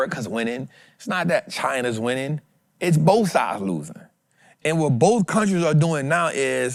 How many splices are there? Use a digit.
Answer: 0